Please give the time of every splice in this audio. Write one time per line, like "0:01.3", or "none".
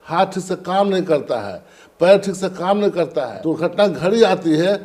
0:03.3